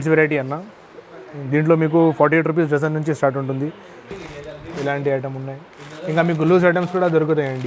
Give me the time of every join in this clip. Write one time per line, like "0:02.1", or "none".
0:04.2